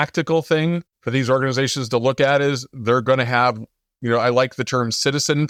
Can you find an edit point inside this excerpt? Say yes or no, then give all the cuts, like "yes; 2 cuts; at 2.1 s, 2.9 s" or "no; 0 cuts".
no; 0 cuts